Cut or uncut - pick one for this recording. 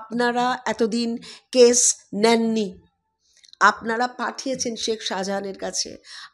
uncut